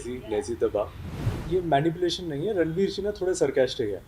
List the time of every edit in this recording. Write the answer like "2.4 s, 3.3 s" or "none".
1.4 s